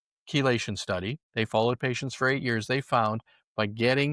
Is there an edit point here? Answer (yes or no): yes